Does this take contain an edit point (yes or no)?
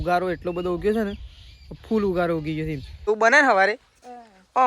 yes